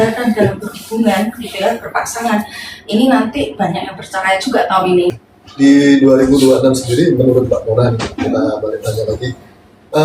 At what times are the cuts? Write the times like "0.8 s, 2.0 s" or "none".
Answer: 5.2 s